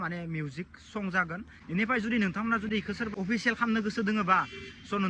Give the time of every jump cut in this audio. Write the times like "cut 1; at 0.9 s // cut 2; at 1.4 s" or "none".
cut 1; at 1.5 s // cut 2; at 3.1 s

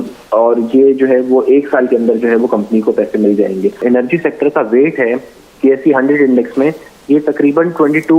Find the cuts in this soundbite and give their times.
cut 1; at 3.8 s

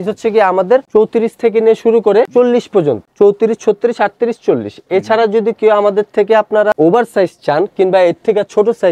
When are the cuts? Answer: none

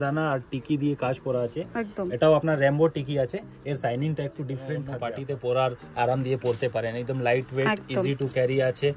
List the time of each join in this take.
cut 1; at 4.9 s

